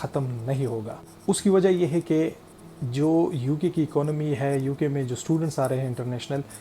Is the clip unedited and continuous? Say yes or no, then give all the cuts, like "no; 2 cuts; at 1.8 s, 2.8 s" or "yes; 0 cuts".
yes; 0 cuts